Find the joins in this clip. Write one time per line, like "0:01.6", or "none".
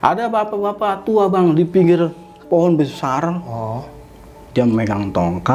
none